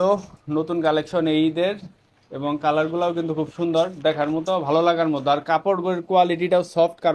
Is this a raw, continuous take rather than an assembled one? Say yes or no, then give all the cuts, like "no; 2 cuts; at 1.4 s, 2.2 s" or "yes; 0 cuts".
yes; 0 cuts